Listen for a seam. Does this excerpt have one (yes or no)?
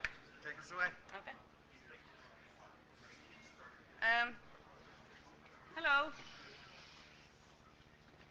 no